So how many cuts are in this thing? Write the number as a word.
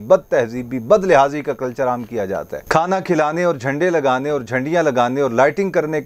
one